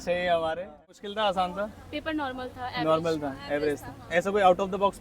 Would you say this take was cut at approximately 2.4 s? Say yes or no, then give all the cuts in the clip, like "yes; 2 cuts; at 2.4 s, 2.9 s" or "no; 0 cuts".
no; 1 cut; at 0.9 s